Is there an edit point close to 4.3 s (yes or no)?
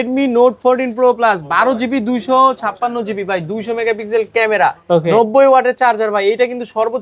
no